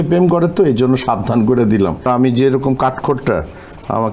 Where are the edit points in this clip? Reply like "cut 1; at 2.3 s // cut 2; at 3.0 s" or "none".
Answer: cut 1; at 2.0 s